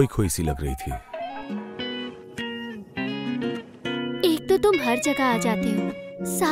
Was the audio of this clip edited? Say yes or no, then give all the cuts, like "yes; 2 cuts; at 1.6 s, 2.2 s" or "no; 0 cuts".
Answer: yes; 1 cut; at 1.4 s